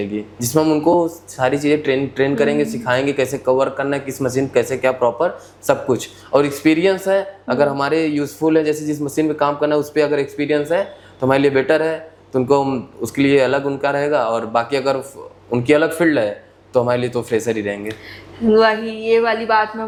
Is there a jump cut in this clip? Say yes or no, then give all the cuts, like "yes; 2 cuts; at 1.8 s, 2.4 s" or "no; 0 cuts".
no; 0 cuts